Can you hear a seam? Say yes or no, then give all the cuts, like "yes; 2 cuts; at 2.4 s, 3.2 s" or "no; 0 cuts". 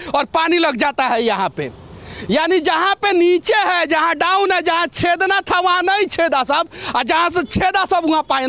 no; 0 cuts